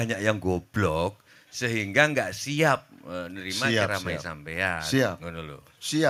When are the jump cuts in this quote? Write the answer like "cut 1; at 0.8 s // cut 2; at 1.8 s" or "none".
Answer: none

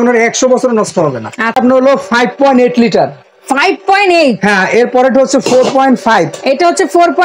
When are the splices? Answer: cut 1; at 1.6 s

